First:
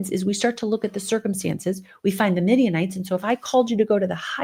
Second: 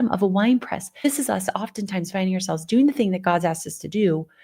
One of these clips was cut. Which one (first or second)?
second